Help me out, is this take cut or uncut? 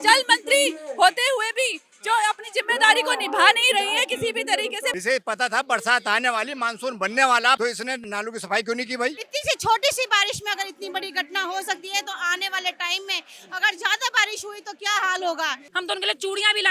cut